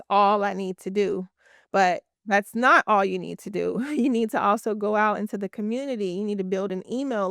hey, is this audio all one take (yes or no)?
yes